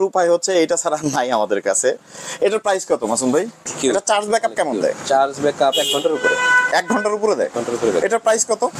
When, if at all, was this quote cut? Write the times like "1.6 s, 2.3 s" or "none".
3.7 s